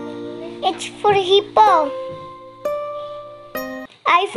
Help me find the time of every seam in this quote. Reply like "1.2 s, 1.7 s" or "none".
none